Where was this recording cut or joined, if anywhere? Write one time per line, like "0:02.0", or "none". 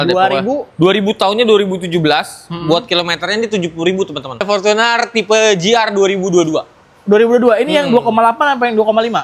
0:04.4